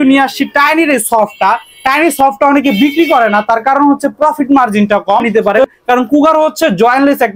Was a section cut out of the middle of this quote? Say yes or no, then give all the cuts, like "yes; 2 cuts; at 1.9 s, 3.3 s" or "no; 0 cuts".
yes; 1 cut; at 5.3 s